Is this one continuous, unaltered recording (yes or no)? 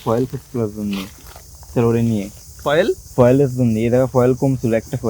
yes